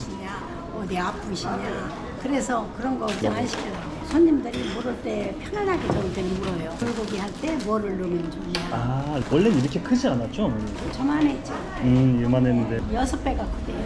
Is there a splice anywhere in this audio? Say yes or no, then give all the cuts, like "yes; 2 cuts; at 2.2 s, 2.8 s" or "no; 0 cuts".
no; 0 cuts